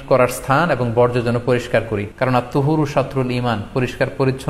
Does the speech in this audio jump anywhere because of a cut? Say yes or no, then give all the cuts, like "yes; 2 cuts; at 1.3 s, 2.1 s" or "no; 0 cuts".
yes; 1 cut; at 2.0 s